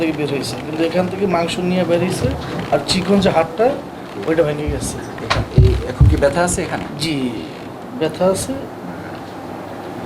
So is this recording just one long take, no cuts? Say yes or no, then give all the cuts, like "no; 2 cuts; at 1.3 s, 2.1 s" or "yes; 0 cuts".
yes; 0 cuts